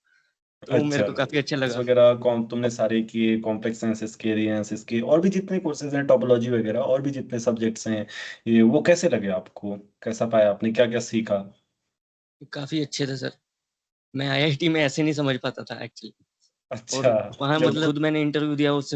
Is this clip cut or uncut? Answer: cut